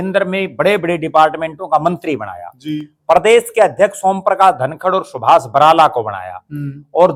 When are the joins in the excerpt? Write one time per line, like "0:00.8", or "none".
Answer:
none